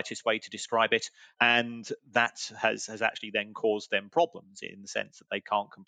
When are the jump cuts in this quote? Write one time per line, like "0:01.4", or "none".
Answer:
0:01.2